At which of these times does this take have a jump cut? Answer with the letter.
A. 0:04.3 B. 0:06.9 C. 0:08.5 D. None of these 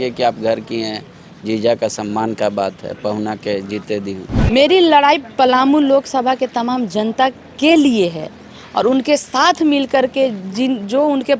A